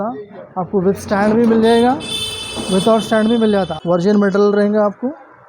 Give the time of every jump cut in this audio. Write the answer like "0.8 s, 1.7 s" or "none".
4.0 s